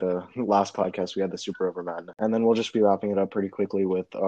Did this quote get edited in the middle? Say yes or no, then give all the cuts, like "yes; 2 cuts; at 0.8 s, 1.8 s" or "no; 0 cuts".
yes; 1 cut; at 2.2 s